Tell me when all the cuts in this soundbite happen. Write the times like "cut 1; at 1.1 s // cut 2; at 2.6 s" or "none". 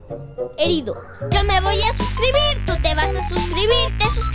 cut 1; at 1.1 s